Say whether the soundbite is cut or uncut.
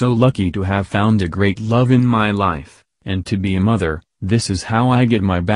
uncut